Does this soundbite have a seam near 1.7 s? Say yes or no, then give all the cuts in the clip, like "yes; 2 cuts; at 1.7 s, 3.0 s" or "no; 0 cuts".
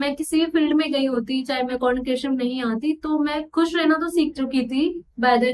yes; 1 cut; at 1.7 s